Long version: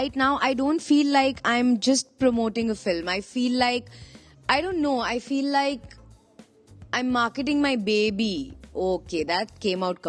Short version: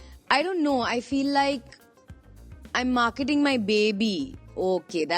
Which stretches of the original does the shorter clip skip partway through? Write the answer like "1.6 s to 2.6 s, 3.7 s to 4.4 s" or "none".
none